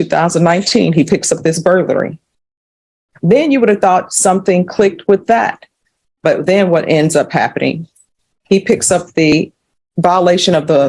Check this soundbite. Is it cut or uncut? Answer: cut